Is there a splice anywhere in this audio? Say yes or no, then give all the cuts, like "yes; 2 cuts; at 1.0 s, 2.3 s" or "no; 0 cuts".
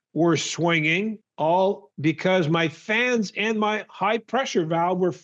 no; 0 cuts